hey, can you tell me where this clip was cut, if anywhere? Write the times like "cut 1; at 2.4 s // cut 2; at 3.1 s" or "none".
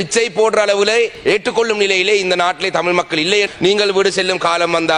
cut 1; at 1.1 s // cut 2; at 3.5 s